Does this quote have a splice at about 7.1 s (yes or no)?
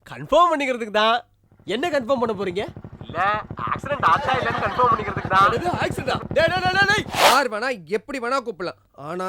yes